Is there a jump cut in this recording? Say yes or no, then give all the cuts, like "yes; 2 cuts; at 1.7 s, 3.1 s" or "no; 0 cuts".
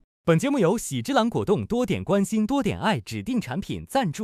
no; 0 cuts